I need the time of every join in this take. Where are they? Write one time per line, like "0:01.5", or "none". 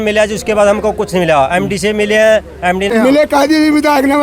0:02.9

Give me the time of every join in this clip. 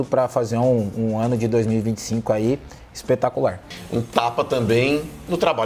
0:03.7

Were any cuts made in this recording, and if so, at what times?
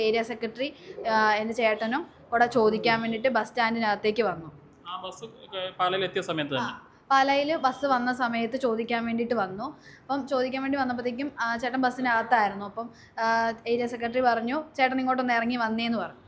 none

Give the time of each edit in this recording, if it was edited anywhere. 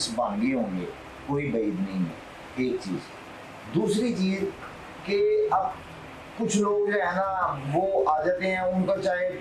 none

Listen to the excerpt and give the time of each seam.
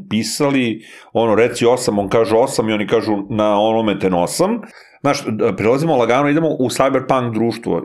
0:04.8

